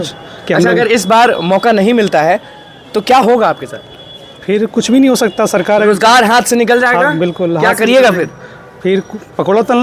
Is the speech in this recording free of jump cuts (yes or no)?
yes